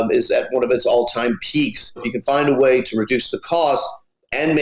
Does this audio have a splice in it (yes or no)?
yes